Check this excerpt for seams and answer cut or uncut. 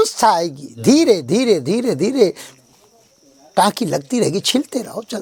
uncut